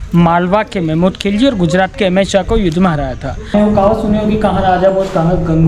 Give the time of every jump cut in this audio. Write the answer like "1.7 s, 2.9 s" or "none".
3.5 s